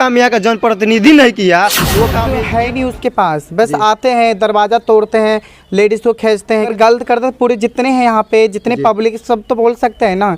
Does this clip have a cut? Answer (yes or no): yes